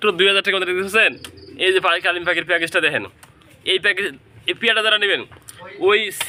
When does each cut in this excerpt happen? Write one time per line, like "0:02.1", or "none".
none